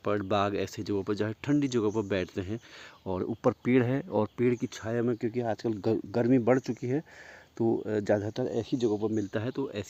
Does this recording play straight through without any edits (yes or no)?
yes